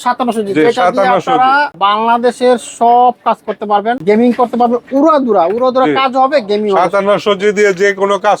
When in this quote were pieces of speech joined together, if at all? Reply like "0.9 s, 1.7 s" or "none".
1.7 s, 4.0 s